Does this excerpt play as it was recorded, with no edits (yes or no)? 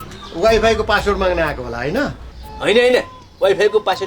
yes